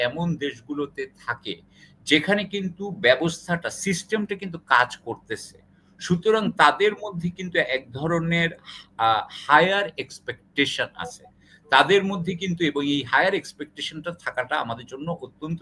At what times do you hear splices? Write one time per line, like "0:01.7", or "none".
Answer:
none